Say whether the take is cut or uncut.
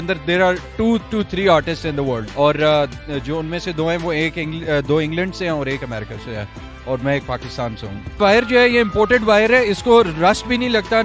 cut